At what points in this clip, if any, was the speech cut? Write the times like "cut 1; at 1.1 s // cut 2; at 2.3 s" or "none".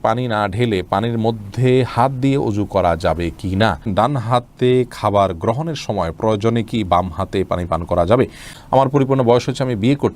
cut 1; at 3.8 s // cut 2; at 8.5 s